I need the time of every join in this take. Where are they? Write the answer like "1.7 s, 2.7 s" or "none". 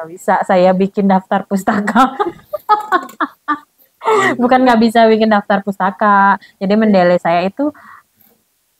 none